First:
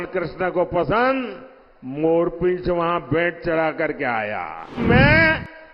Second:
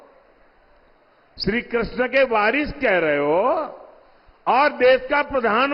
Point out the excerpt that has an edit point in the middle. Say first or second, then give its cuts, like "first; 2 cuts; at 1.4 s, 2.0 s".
first; 1 cut; at 4.8 s